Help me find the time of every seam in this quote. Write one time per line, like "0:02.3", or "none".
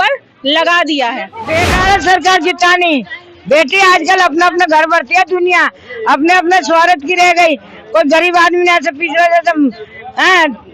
0:01.3